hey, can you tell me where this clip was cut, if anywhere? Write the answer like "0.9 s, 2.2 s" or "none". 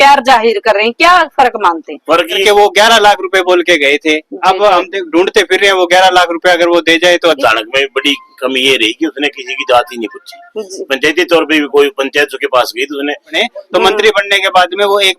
2.4 s, 7.3 s, 13.4 s